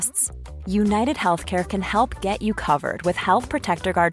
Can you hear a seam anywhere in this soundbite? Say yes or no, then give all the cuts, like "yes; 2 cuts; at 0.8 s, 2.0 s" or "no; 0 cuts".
no; 0 cuts